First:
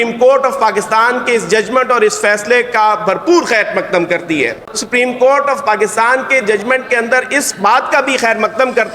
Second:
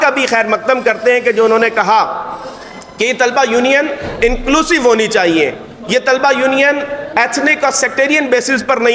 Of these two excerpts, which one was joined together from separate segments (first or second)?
first